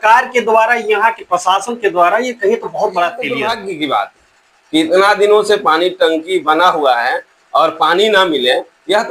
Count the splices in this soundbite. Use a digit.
1